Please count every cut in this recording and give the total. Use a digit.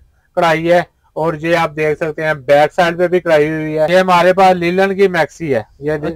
1